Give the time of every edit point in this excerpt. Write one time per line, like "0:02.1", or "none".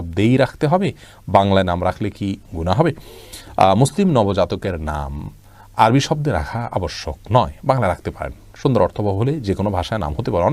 none

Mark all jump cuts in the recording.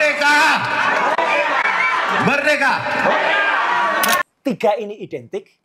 0:04.2

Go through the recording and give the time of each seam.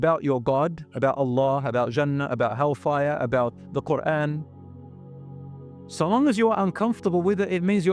none

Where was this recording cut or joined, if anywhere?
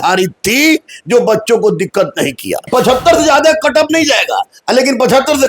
0:02.7

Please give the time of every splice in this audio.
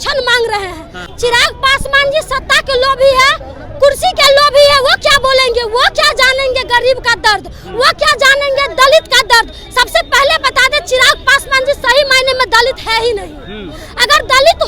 0:01.0

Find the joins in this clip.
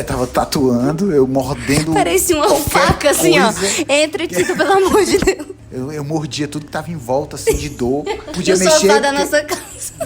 0:05.6
0:08.3

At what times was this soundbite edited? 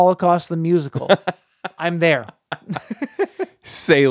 none

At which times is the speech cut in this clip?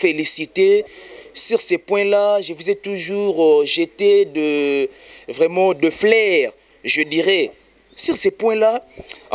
none

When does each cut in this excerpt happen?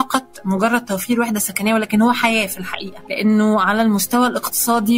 none

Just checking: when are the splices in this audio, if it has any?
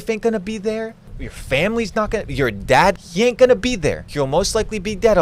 0:02.9
0:04.0

